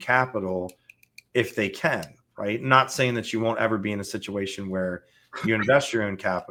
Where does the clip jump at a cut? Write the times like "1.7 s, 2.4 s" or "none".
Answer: none